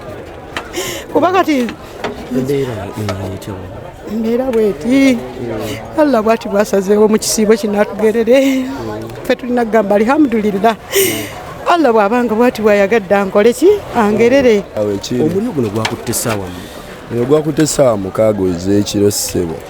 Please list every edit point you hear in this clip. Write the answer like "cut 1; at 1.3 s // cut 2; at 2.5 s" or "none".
cut 1; at 14.8 s